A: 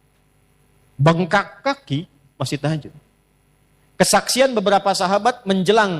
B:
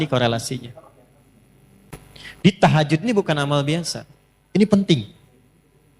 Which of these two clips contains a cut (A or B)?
B